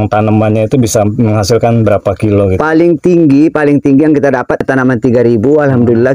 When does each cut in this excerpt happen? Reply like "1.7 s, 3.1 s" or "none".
4.6 s